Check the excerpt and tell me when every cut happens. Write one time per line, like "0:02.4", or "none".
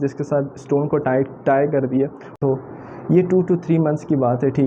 0:02.4